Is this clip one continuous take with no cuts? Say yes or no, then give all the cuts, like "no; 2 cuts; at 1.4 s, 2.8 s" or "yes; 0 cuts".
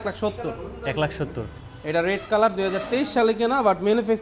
yes; 0 cuts